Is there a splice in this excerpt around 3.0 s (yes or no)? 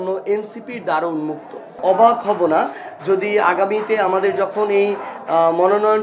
no